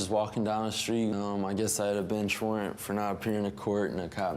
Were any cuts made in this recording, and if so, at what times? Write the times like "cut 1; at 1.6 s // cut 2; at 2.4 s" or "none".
cut 1; at 1.1 s